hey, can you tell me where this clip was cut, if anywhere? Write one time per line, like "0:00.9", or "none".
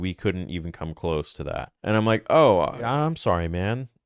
0:01.7
0:02.8